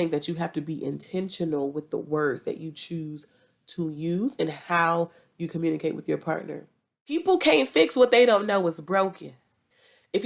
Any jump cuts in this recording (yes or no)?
yes